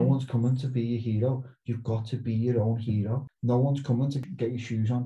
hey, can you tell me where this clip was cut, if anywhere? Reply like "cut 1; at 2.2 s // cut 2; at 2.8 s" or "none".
cut 1; at 3.2 s // cut 2; at 4.2 s